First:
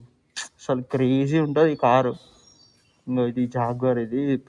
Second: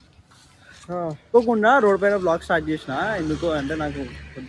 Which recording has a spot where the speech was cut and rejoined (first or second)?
second